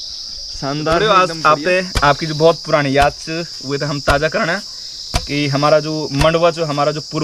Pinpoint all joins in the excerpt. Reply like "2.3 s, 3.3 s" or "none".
1.0 s